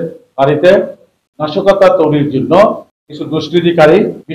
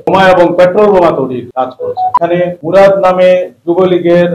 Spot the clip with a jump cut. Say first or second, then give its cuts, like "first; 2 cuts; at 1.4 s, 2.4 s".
second; 1 cut; at 2.2 s